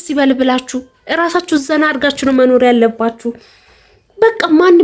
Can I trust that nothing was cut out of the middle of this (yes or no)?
yes